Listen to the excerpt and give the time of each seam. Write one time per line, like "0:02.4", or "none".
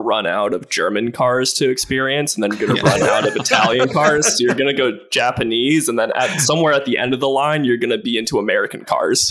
none